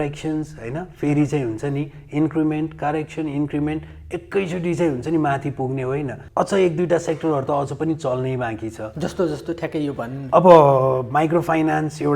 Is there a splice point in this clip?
yes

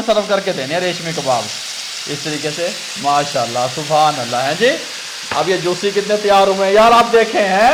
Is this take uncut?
yes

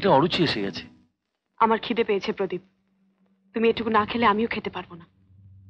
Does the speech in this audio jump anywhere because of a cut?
no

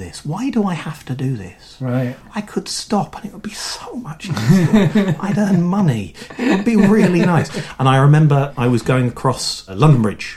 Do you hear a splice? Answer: no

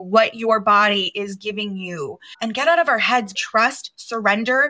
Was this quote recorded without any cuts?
no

